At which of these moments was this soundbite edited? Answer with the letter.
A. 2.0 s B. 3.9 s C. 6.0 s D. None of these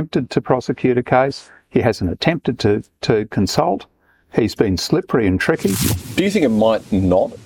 C